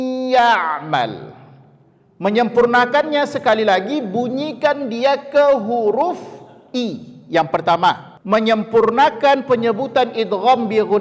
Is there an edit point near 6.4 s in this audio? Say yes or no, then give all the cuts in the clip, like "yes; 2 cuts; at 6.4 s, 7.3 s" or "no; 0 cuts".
no; 1 cut; at 8.1 s